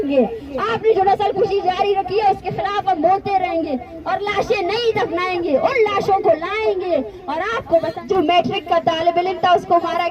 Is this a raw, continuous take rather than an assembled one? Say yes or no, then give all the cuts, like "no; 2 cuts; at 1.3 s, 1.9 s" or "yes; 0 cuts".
no; 1 cut; at 7.9 s